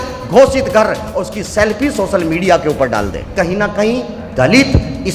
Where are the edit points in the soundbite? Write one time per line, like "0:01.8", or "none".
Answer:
0:03.3